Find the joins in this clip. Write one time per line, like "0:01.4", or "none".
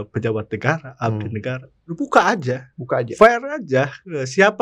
0:02.7